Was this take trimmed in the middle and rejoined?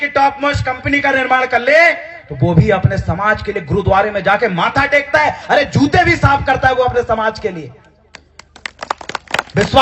no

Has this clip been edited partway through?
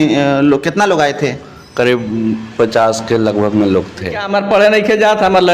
yes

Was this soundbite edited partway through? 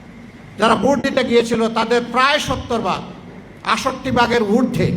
no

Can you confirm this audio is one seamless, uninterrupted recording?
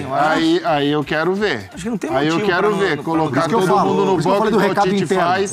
yes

